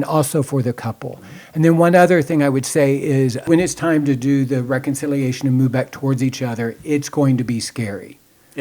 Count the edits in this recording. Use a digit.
1